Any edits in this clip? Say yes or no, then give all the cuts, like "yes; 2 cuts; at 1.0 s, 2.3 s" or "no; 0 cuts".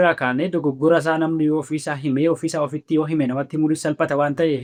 no; 0 cuts